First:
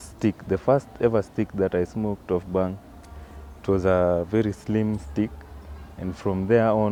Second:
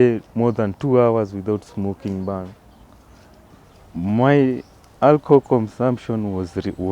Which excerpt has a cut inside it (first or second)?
second